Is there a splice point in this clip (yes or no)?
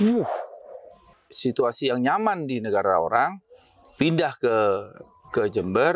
yes